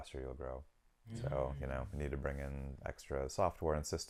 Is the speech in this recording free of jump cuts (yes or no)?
yes